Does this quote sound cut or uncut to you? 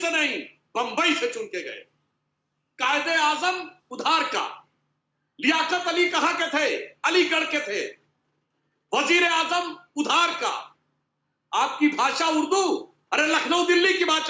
uncut